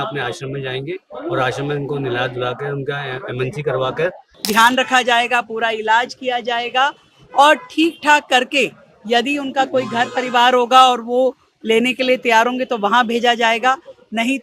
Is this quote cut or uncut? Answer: cut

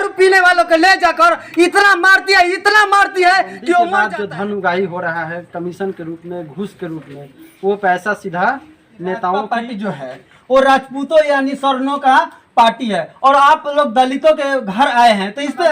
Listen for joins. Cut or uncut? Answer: cut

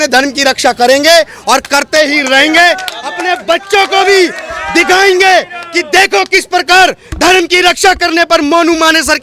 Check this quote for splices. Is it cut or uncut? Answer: uncut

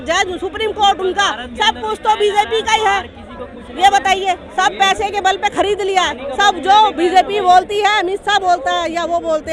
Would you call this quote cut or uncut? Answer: uncut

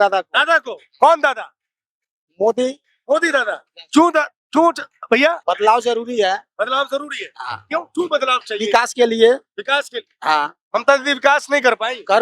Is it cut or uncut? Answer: uncut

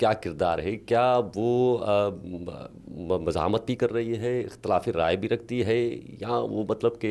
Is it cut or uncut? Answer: uncut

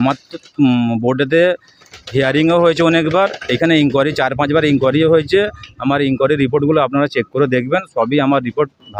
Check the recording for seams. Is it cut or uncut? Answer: uncut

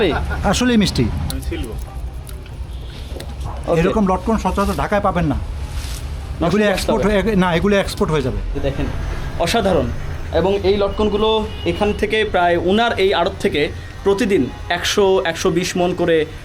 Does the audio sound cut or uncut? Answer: cut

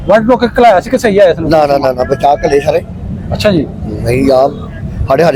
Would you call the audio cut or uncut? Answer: uncut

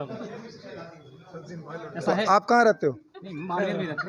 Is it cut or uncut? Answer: uncut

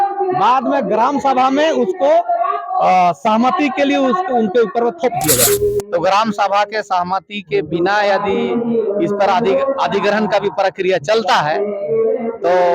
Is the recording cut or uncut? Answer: cut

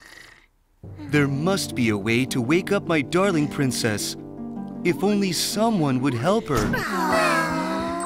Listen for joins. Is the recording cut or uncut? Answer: cut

